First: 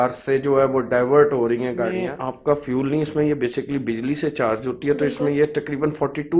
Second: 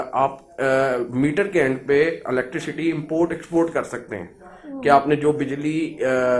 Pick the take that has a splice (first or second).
first